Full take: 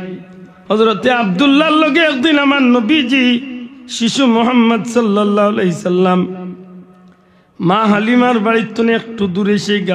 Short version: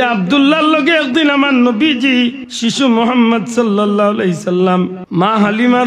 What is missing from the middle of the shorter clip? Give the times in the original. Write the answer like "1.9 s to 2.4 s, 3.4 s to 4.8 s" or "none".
3.5 s to 3.8 s, 6.4 s to 7.5 s